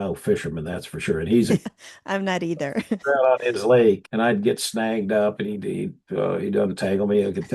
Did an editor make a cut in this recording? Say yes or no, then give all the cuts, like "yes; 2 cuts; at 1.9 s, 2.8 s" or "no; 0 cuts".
yes; 2 cuts; at 1.6 s, 4.1 s